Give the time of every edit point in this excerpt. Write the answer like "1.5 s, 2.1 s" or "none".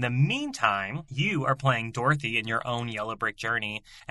1.0 s